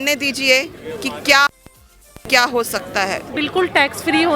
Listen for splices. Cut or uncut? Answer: cut